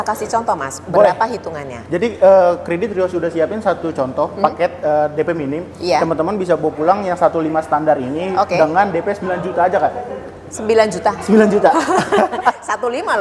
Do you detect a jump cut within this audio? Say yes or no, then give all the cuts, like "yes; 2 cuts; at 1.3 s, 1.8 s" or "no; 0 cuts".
no; 0 cuts